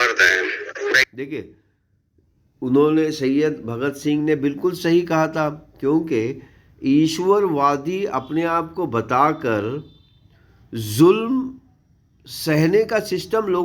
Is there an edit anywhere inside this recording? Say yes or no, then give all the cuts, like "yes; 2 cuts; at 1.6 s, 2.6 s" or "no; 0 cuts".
no; 0 cuts